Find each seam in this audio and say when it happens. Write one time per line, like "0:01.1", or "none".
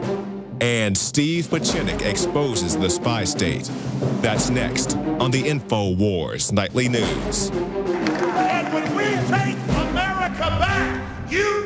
0:06.2

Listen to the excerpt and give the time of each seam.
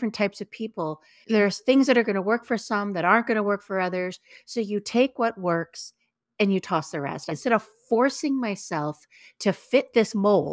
0:01.2
0:07.3

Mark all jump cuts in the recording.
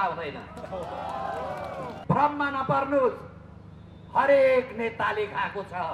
0:01.9

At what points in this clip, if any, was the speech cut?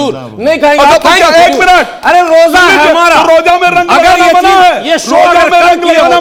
none

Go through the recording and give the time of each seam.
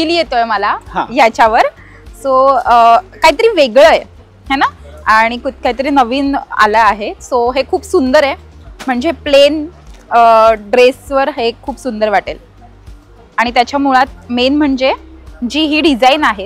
none

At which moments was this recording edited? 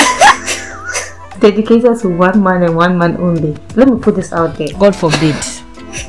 0:01.3
0:03.6

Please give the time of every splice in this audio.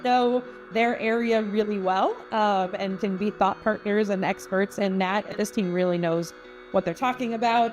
0:05.3

